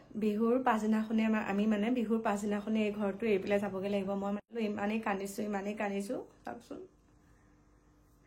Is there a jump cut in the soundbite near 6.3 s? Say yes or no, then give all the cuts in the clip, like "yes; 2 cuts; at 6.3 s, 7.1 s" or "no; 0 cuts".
no; 1 cut; at 4.4 s